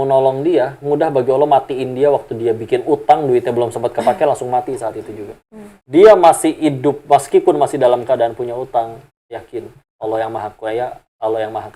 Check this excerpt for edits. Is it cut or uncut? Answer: uncut